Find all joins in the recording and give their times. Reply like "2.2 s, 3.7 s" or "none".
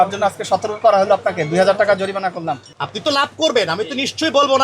2.7 s